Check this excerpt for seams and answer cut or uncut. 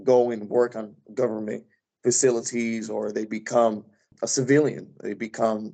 uncut